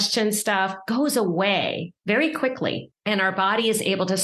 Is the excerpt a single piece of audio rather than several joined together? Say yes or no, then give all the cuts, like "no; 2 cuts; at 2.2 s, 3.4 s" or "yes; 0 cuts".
no; 2 cuts; at 1.9 s, 2.9 s